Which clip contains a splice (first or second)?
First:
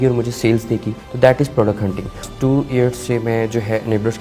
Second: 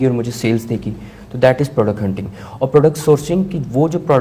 first